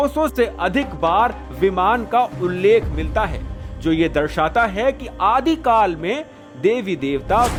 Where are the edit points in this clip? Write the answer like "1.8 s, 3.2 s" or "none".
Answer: none